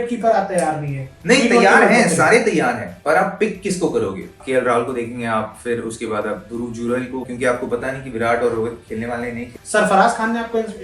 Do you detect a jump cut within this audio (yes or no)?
yes